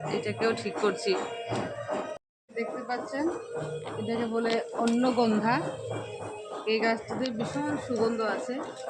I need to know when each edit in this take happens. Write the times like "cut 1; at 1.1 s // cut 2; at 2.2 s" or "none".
cut 1; at 2.3 s